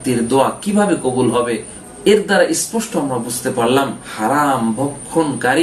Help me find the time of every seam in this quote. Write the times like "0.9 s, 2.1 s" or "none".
none